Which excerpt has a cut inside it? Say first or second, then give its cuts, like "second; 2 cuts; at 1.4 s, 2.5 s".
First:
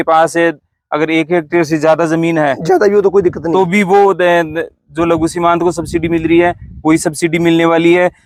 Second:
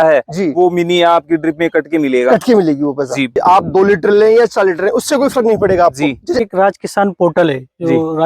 second; 2 cuts; at 3.3 s, 6.4 s